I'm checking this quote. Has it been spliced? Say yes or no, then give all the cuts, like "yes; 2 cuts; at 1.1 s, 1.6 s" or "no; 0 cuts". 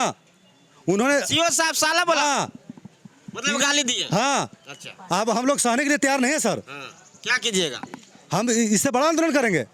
no; 0 cuts